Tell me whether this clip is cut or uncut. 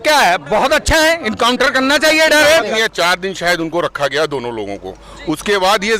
cut